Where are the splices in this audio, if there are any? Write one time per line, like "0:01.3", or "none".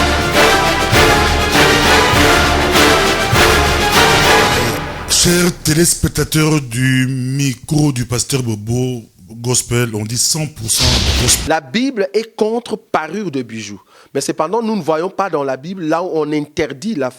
0:11.4